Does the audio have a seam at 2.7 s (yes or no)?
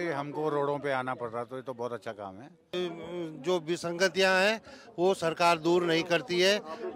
yes